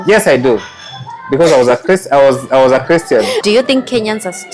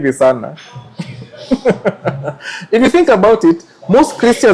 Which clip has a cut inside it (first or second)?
first